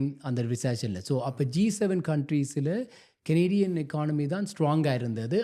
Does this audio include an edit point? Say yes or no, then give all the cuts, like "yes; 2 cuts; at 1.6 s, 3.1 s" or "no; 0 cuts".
no; 0 cuts